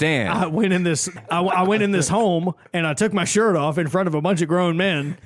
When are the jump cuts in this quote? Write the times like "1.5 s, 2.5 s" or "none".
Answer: 1.1 s